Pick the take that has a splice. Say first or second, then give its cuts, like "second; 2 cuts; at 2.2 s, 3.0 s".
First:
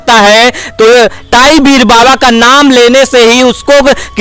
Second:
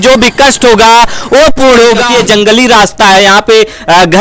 second; 1 cut; at 2.0 s